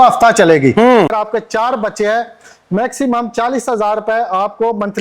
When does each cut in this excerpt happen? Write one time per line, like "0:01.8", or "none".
0:01.1